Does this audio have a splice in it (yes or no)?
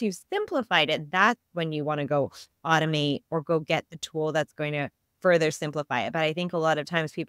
no